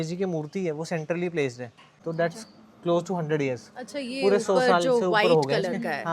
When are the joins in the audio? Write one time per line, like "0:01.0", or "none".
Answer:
0:01.9